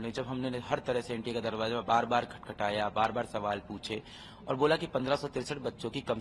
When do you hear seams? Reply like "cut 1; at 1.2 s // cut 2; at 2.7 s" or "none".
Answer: none